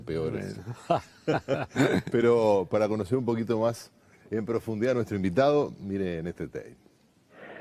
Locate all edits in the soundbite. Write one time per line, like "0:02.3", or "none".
none